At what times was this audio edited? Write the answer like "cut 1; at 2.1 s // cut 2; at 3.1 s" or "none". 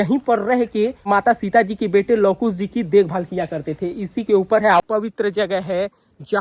cut 1; at 1.0 s // cut 2; at 4.8 s

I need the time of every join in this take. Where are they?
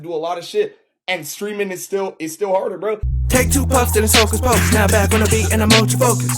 cut 1; at 3.0 s

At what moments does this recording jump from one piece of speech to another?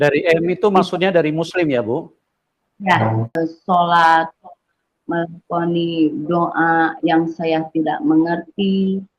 cut 1; at 3.3 s

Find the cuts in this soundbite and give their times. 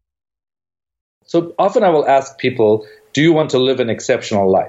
cut 1; at 1.2 s

